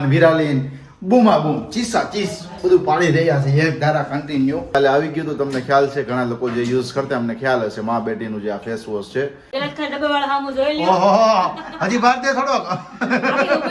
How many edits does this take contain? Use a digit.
2